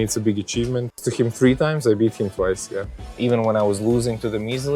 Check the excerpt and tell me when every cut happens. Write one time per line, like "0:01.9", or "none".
0:01.0
0:03.0